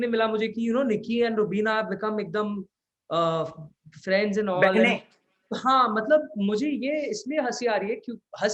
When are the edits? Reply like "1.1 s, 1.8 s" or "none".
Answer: none

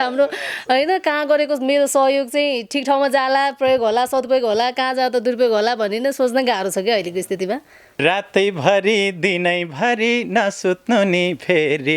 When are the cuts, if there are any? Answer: 8.0 s

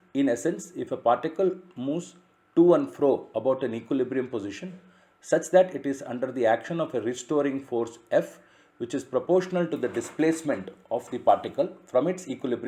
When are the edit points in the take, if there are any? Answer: 4.3 s

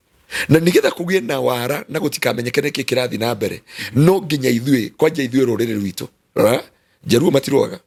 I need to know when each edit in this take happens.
none

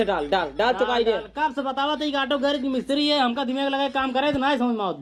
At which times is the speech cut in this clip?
none

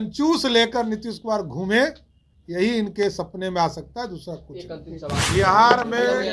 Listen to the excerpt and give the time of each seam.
5.3 s

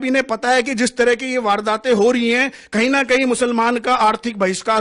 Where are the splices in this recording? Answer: none

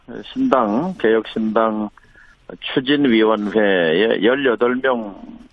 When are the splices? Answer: none

